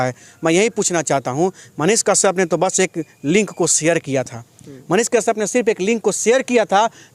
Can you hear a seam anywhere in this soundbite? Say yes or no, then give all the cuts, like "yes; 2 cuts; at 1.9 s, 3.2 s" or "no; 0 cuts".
no; 0 cuts